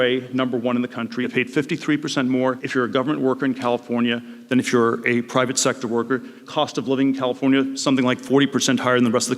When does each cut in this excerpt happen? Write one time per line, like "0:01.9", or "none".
0:01.3
0:02.6
0:06.4
0:07.8